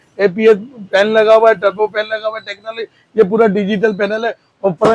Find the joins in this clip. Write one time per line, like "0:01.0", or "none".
none